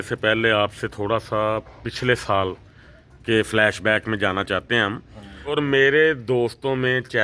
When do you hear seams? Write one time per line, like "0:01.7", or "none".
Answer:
0:05.5

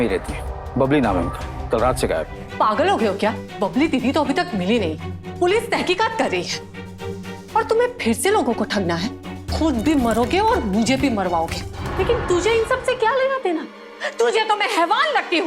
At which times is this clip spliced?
0:02.4
0:11.8

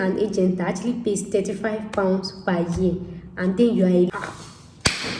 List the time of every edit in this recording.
0:04.1

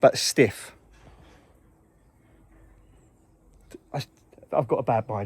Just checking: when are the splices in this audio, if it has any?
none

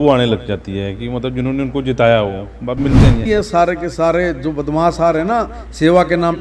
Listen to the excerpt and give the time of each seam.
0:03.2

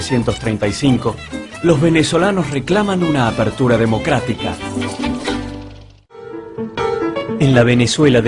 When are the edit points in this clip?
0:01.5

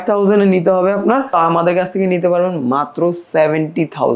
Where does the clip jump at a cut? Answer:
0:01.4

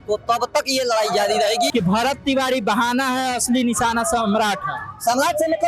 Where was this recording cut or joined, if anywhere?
0:01.7

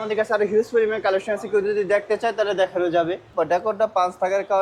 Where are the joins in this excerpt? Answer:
0:03.3

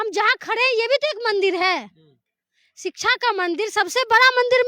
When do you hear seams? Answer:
none

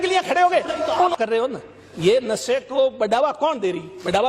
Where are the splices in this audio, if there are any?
0:01.1

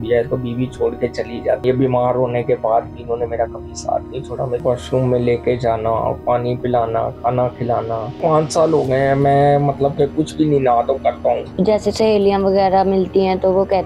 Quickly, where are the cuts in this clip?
0:01.6
0:04.6
0:08.2
0:11.5

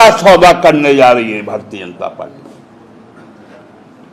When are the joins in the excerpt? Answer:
none

